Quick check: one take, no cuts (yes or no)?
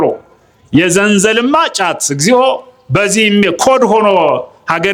yes